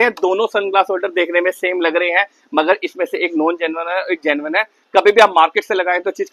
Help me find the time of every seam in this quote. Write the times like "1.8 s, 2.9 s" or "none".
none